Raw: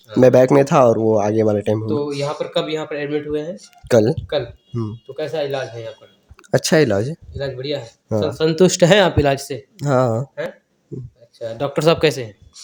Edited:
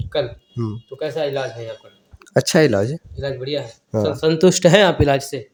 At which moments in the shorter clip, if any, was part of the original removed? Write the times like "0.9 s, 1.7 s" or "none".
none